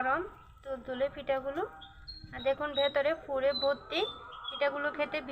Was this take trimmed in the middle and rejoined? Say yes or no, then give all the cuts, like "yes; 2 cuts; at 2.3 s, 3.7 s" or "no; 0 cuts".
no; 0 cuts